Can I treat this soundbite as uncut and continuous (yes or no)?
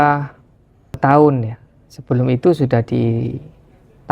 no